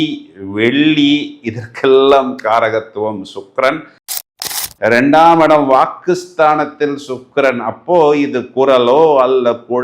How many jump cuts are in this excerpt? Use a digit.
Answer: 1